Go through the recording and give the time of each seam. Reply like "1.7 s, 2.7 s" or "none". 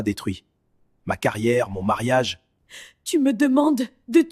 2.7 s